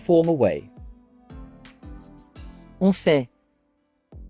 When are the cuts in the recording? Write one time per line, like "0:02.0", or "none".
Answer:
0:03.4